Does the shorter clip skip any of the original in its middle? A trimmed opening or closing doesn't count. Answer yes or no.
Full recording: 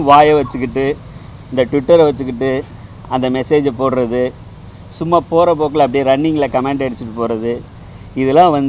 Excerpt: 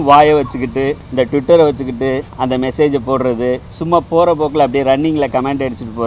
yes